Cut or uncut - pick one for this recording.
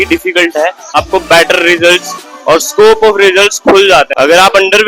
cut